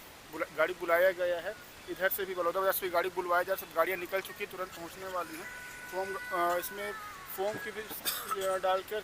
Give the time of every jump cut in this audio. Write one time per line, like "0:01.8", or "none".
none